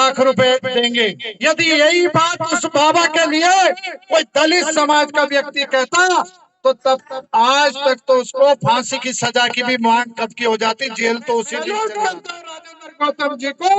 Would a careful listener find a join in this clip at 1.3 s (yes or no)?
yes